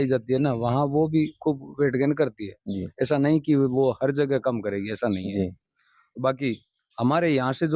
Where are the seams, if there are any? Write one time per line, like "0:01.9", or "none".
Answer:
none